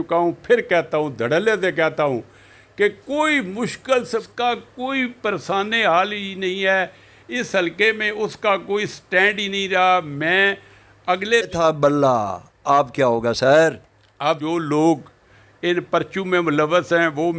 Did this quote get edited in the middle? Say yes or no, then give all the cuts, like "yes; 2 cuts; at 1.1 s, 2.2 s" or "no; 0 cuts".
yes; 3 cuts; at 4.2 s, 11.5 s, 14.4 s